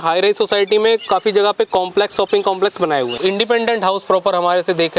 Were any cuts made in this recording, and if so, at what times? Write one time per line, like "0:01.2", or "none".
0:03.1